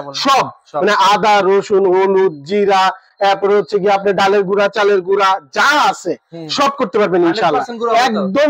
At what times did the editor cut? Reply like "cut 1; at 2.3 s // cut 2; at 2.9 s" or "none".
none